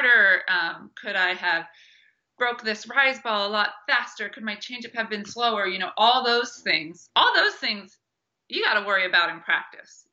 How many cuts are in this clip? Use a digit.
0